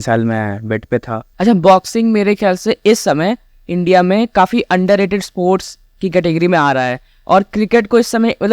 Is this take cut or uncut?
cut